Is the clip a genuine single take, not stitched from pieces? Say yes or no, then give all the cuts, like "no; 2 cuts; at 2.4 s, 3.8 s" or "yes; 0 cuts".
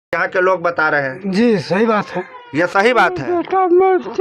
no; 1 cut; at 3.3 s